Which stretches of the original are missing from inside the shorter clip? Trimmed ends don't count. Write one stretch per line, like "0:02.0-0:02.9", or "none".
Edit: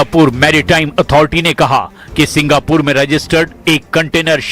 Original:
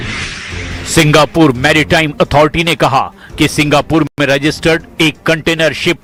0:04.1-0:04.2